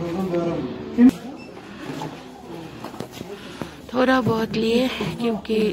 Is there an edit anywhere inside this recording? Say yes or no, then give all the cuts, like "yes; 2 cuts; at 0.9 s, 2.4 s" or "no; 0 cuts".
yes; 1 cut; at 1.1 s